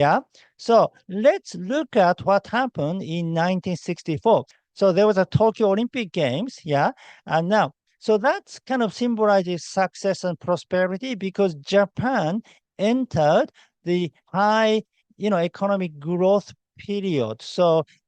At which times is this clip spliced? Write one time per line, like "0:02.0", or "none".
none